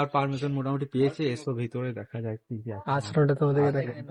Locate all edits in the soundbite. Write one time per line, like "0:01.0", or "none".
none